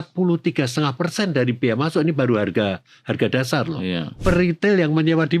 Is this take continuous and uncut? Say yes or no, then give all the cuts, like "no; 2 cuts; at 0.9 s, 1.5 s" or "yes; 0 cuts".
no; 1 cut; at 4.1 s